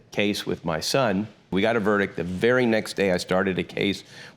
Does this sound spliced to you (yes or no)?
yes